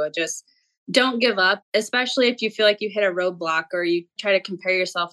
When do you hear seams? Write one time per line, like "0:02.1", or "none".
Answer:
0:01.6
0:04.1